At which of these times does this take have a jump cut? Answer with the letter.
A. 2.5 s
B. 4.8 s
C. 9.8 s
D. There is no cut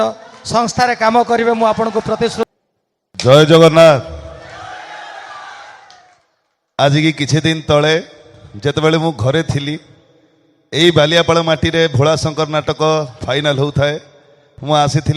A